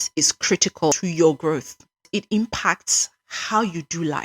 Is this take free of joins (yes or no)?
no